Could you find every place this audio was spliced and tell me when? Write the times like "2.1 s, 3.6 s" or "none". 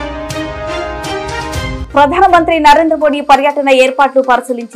none

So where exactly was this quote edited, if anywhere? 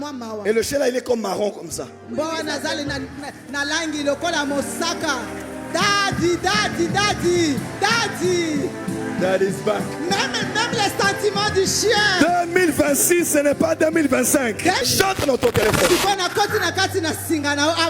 15.1 s

